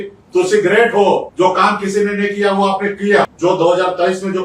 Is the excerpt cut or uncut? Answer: cut